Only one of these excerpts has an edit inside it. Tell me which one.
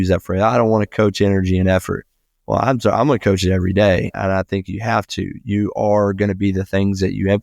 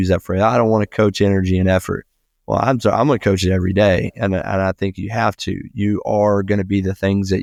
first; 1 cut; at 4.1 s

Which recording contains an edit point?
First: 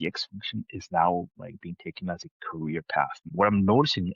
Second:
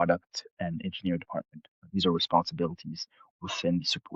first; 1 cut; at 3.2 s

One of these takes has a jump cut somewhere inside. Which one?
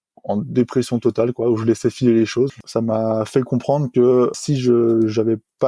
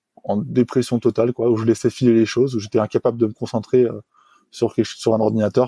first; 2 cuts; at 2.6 s, 4.3 s

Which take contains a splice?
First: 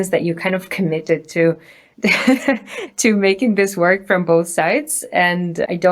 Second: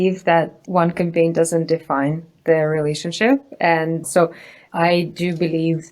second; 1 cut; at 4.0 s

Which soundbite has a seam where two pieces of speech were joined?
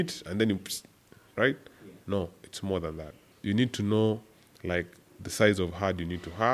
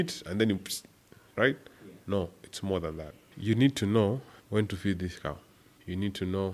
second; 1 cut; at 3.2 s

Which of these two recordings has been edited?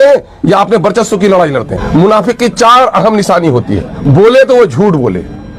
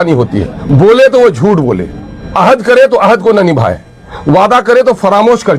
first; 1 cut; at 1.7 s

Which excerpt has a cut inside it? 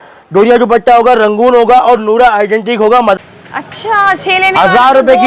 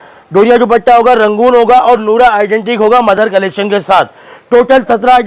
first; 1 cut; at 3.2 s

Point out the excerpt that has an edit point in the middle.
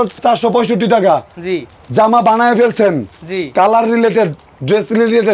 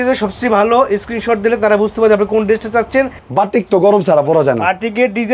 second; 1 cut; at 3.2 s

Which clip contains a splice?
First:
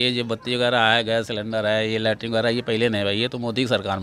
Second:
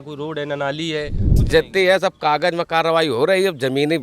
second; 1 cut; at 1.4 s

